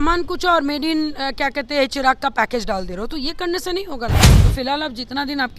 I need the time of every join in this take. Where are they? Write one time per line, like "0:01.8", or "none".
0:04.3